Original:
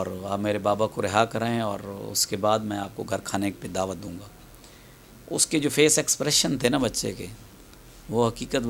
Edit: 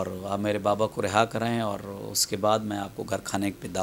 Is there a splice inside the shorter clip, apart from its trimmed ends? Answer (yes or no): no